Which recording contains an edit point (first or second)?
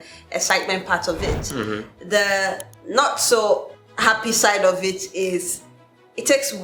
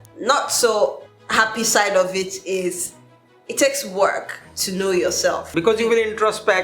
second